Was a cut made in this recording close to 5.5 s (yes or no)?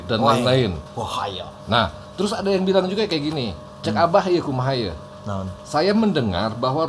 yes